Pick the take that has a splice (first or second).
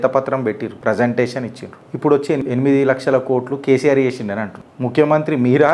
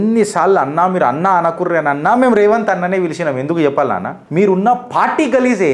second